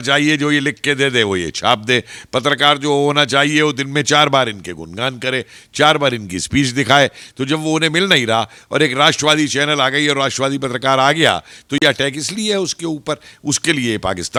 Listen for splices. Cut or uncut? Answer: uncut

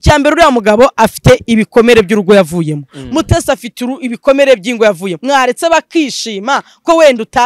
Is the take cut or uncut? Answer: cut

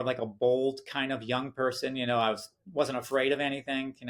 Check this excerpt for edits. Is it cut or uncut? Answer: uncut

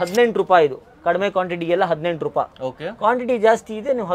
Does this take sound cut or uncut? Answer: uncut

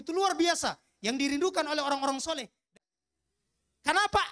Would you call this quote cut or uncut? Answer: cut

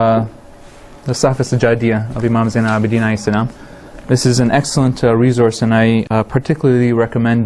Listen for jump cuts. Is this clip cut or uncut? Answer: uncut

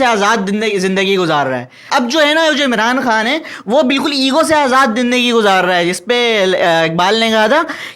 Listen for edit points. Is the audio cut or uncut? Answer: cut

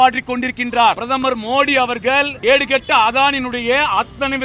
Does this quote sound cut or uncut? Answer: cut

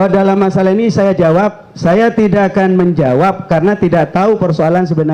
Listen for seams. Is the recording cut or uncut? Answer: uncut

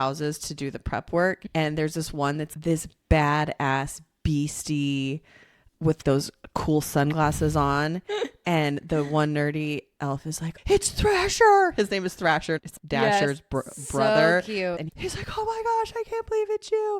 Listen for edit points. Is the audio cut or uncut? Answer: cut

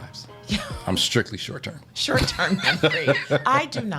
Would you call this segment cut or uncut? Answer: uncut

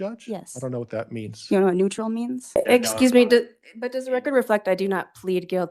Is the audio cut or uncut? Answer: cut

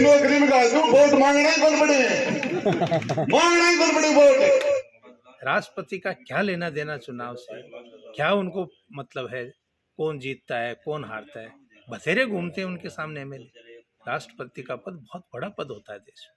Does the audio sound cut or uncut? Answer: uncut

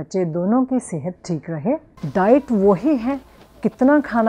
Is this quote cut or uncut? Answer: cut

